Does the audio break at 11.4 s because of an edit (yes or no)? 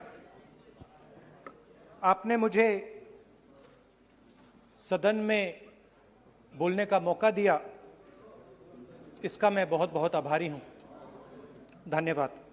no